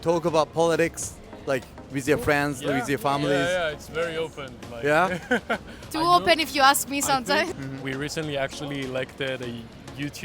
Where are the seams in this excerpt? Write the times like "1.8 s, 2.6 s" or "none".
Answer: 7.5 s